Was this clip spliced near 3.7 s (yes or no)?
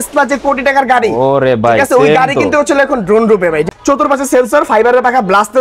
yes